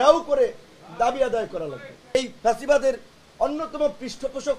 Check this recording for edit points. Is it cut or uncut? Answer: cut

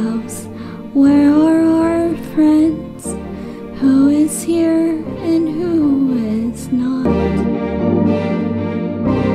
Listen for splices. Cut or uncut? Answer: cut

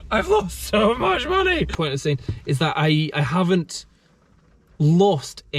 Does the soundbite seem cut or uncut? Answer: cut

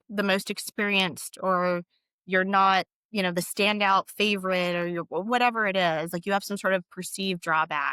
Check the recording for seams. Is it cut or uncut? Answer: uncut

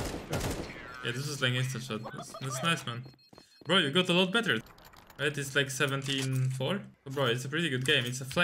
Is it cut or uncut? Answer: cut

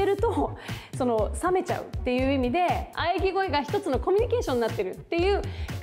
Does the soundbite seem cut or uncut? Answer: cut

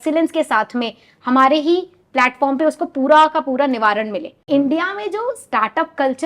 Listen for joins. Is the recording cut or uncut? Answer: cut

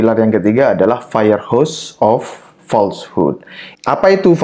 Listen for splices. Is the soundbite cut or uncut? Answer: uncut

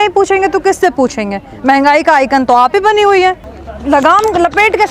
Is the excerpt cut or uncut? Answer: cut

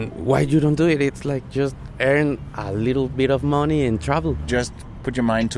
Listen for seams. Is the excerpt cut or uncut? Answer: cut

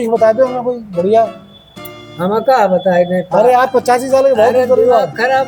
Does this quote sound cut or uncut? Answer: uncut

